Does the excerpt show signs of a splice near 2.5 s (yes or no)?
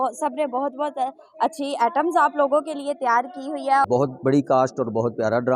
no